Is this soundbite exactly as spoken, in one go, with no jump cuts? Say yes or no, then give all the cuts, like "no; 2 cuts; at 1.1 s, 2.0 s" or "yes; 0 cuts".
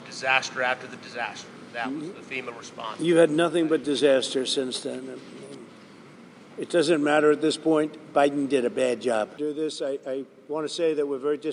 no; 1 cut; at 9.3 s